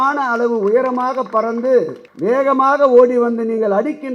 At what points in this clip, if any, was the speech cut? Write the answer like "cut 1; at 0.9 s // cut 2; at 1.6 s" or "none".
cut 1; at 2.0 s